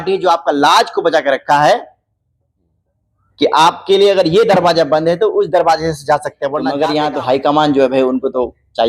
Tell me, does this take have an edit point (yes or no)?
yes